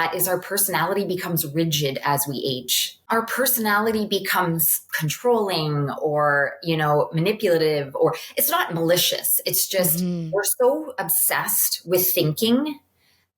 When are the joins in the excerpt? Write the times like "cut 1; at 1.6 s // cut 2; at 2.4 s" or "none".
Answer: cut 1; at 3.1 s